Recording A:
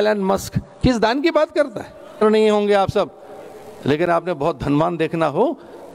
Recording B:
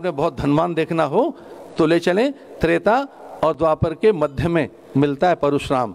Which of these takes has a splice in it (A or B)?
A